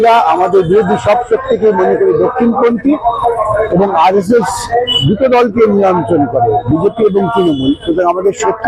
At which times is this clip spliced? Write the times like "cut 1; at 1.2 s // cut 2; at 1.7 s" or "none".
none